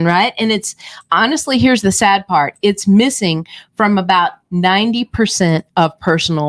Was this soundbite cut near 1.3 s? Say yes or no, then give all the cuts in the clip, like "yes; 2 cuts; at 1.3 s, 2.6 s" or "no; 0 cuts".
no; 0 cuts